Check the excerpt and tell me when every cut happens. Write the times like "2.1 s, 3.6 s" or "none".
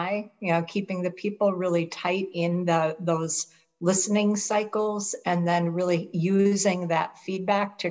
none